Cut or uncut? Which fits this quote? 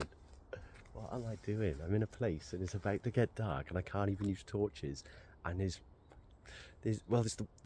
uncut